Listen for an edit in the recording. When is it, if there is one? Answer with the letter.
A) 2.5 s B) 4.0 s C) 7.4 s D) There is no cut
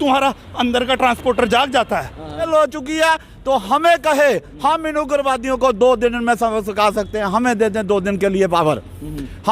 A